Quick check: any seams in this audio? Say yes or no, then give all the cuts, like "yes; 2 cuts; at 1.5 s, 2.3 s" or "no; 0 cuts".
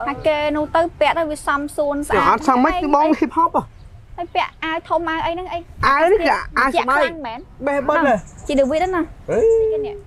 no; 0 cuts